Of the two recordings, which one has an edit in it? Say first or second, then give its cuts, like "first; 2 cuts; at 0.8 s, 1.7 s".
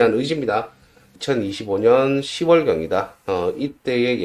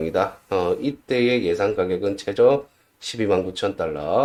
first; 1 cut; at 1.1 s